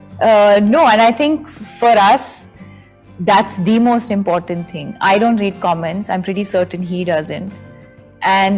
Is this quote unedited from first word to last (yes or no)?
yes